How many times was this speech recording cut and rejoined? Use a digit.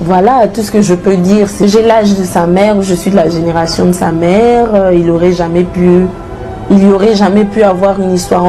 1